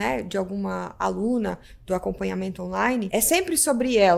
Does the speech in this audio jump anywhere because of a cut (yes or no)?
yes